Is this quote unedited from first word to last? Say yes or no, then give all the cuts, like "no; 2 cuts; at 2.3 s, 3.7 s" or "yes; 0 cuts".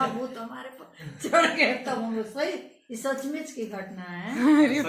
yes; 0 cuts